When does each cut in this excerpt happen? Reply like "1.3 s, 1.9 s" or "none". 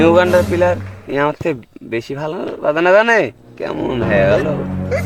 none